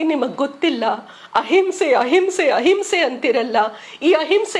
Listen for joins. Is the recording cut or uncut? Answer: uncut